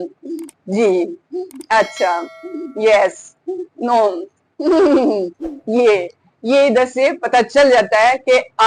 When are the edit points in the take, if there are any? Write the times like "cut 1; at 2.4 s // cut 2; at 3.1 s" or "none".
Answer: none